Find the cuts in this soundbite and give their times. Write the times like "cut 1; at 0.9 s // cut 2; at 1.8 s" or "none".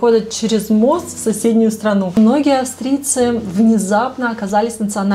cut 1; at 2.2 s

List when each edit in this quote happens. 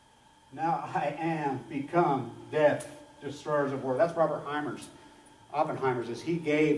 cut 1; at 4.4 s

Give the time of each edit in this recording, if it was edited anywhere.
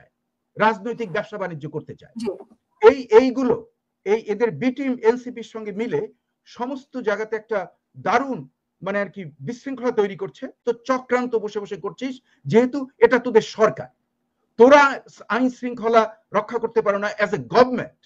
cut 1; at 10.6 s

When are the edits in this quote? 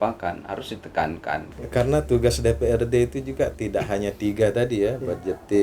cut 1; at 1.5 s

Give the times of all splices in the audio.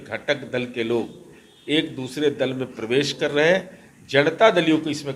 none

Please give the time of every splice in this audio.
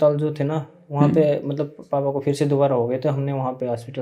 none

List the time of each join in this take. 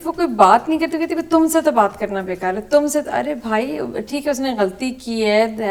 none

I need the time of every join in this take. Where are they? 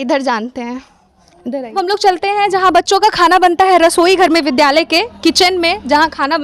cut 1; at 1.7 s

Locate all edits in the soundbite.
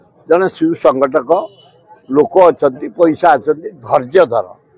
none

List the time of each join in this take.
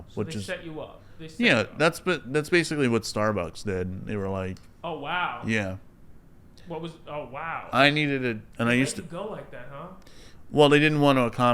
cut 1; at 8.5 s

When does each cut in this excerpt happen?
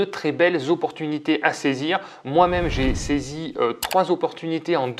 none

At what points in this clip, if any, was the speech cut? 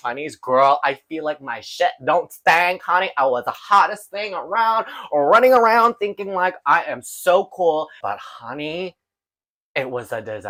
none

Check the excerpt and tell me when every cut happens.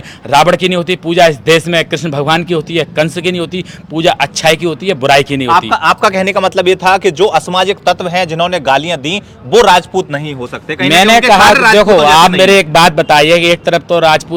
none

